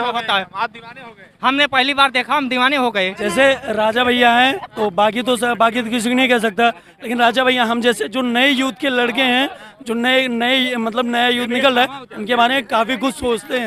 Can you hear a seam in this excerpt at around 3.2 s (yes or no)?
yes